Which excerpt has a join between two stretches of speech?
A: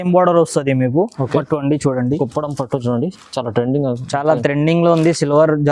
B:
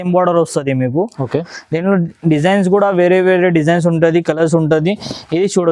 A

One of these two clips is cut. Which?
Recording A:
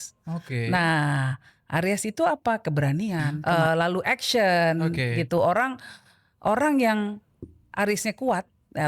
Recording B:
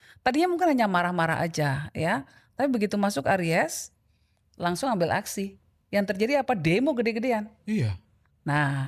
A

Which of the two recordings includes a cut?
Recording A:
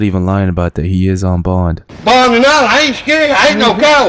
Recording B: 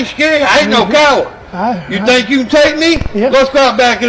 A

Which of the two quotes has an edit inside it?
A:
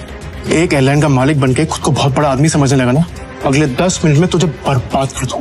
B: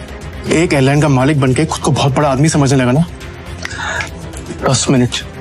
A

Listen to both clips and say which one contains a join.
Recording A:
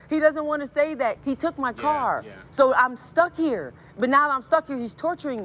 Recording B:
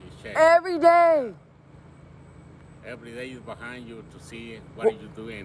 A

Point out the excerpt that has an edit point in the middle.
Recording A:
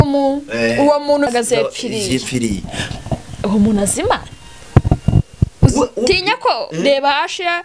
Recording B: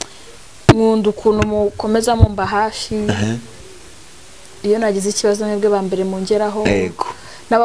A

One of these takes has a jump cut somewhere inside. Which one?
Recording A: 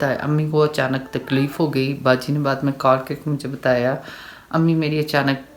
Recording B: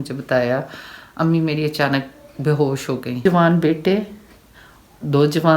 B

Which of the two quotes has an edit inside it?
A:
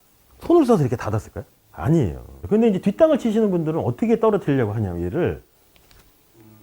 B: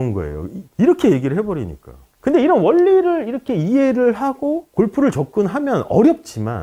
A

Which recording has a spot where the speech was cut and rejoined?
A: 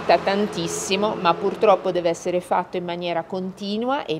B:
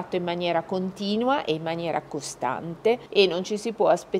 B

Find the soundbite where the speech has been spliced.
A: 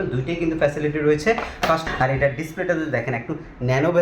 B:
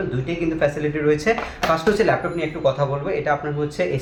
A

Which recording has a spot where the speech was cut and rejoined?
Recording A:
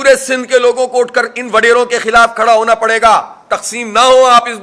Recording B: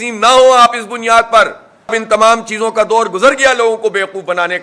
B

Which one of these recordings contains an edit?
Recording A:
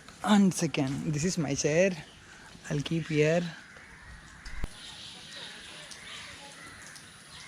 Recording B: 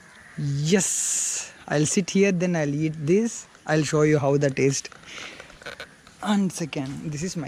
A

